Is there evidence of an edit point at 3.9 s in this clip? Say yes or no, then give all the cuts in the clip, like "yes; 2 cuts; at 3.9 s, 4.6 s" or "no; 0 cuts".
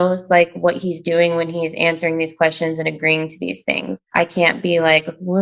yes; 1 cut; at 3.9 s